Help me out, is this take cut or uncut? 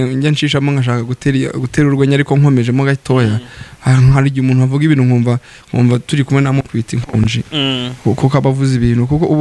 uncut